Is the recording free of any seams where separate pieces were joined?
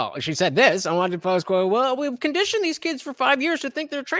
yes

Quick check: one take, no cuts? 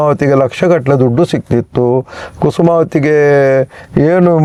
yes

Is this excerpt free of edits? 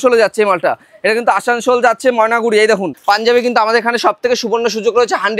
no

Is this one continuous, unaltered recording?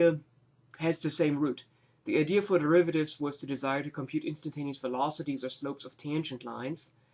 yes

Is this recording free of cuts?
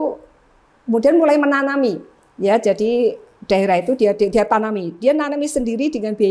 yes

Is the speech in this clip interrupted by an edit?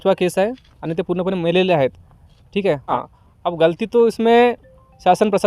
yes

